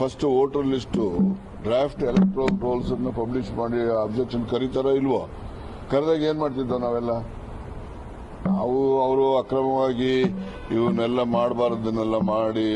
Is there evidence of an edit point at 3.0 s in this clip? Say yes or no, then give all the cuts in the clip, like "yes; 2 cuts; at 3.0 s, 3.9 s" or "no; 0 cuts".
no; 1 cut; at 1.1 s